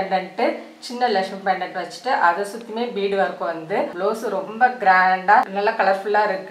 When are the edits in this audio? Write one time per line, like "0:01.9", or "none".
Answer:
0:03.9
0:05.5

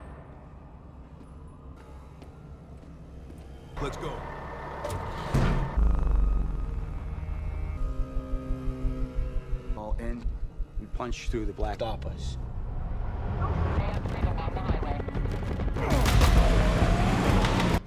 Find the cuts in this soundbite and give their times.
0:13.8

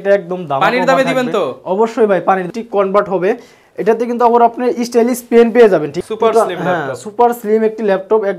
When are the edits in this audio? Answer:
0:02.5
0:05.9

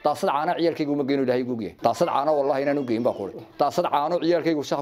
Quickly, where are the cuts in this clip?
0:01.7

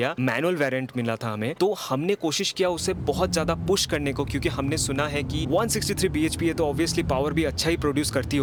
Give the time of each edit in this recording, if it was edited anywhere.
none

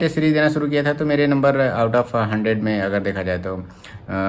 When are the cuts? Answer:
none

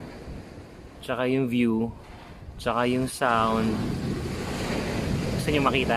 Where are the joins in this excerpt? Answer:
none

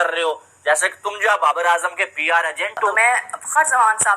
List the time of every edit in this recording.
0:02.9

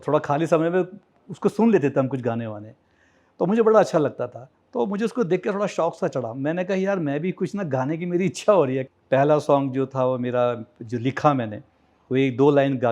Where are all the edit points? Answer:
0:08.9

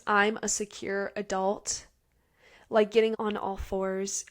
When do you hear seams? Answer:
0:03.1

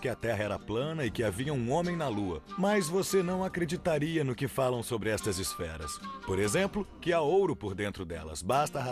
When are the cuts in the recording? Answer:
none

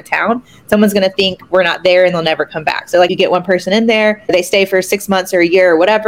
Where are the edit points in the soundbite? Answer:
0:03.1
0:04.3

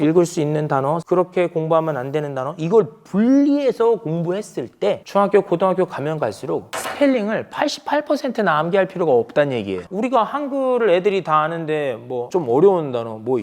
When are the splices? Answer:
0:01.0
0:05.0
0:06.8

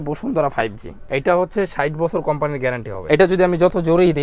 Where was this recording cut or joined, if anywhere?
0:01.0
0:02.9

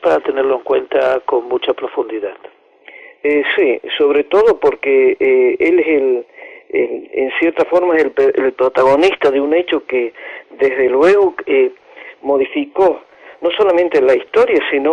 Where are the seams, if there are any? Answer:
0:13.9

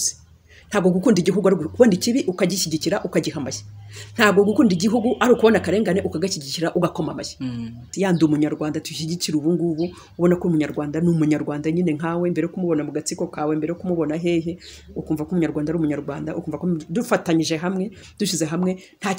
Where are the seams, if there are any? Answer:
0:07.9

